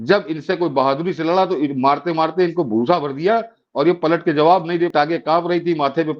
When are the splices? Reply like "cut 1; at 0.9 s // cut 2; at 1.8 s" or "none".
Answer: cut 1; at 4.9 s